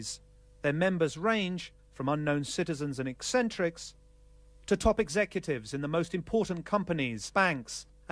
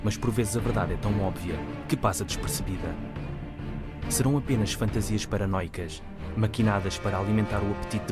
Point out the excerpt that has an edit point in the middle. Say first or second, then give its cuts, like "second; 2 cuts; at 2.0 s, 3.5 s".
first; 1 cut; at 4.6 s